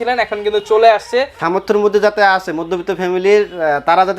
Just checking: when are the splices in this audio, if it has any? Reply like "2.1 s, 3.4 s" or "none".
1.4 s